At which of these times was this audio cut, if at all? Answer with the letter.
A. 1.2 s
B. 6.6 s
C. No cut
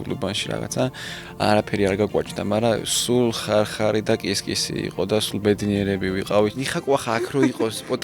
B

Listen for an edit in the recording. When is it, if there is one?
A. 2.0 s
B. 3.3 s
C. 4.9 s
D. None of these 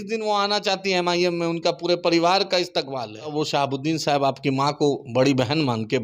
B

